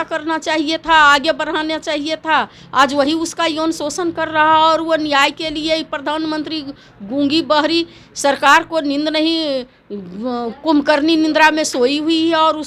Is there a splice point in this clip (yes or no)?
no